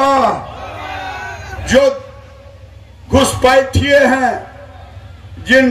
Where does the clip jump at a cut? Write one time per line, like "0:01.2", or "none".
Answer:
0:01.6